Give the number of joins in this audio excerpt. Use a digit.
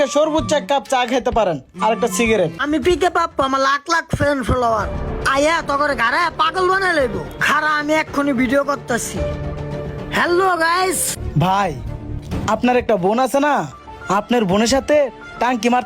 2